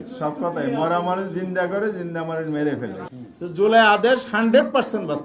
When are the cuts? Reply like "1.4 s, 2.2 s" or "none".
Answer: 3.0 s